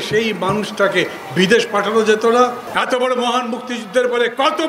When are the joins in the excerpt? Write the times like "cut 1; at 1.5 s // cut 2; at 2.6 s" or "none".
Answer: cut 1; at 2.6 s